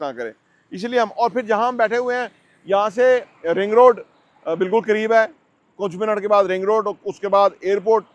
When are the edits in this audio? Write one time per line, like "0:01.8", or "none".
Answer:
none